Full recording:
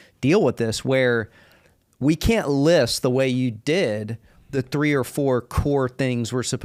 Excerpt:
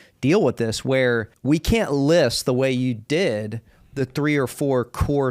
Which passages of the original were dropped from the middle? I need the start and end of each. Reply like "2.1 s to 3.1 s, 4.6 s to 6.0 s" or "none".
1.3 s to 1.9 s

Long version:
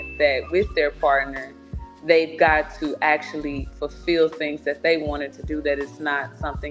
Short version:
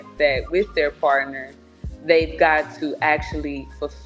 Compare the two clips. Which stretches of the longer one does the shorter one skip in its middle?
none

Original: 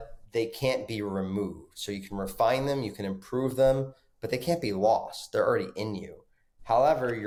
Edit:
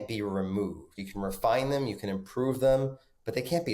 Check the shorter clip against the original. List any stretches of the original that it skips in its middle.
1.7 s to 1.9 s

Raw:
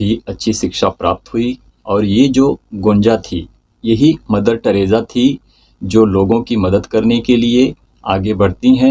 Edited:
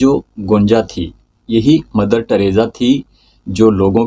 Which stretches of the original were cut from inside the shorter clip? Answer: none

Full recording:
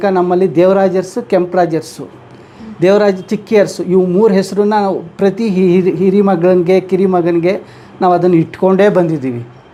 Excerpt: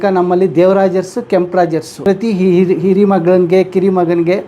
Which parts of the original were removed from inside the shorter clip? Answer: 1.9 s to 5.1 s

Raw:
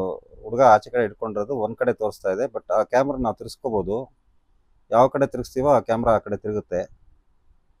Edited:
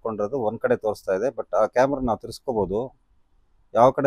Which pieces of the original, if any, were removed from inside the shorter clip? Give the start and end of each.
none

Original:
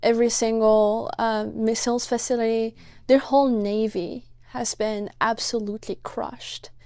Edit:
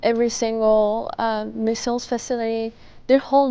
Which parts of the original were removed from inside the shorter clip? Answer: none

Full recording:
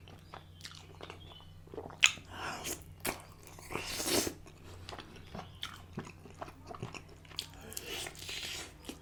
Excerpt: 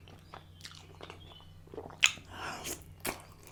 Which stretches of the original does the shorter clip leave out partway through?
none

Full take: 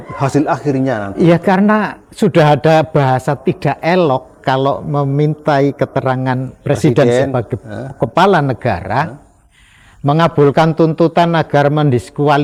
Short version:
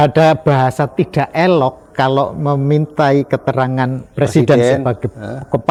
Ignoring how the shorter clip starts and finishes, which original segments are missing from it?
none

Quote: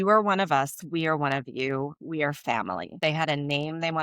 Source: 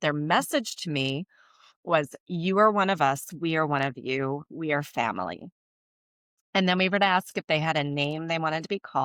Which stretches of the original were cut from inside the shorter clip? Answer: 5.5 s to 7.4 s

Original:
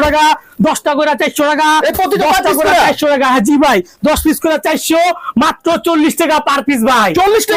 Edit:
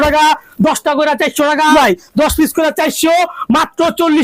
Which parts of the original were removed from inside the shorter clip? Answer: 1.7 s to 3.6 s

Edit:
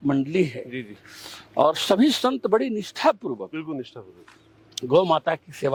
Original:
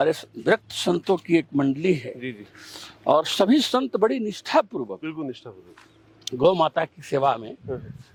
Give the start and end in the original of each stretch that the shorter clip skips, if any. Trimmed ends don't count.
none

